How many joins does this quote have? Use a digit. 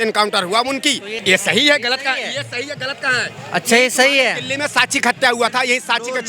1